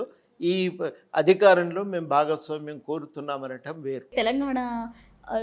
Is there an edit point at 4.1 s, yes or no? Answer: yes